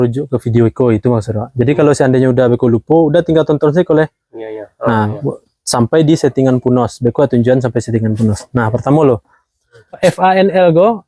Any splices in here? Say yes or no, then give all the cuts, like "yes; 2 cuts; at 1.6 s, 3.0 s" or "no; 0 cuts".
yes; 1 cut; at 9.8 s